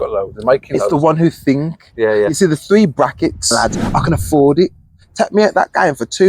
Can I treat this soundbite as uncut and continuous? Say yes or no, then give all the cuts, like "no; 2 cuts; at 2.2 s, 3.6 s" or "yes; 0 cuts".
no; 1 cut; at 3.9 s